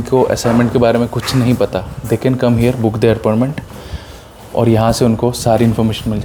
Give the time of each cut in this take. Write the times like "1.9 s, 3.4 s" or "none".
none